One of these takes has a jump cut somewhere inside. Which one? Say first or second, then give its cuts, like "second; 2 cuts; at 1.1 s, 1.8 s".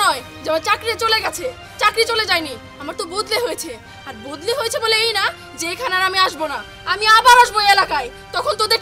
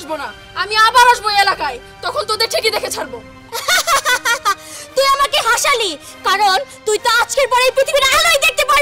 second; 1 cut; at 3.6 s